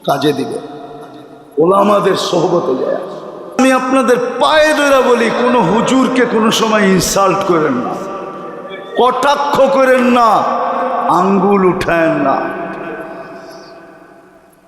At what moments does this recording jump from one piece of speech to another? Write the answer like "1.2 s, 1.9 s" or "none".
3.6 s